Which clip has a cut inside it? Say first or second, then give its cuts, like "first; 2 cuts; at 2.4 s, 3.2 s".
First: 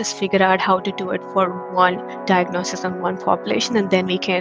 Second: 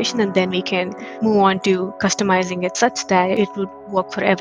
second; 1 cut; at 3.4 s